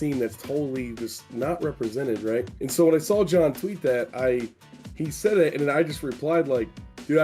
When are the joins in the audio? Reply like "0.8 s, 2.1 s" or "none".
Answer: none